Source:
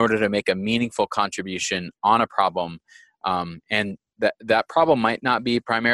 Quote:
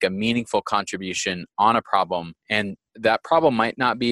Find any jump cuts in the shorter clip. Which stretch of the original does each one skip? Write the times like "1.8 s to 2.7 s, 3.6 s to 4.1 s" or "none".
3.3 s to 4.3 s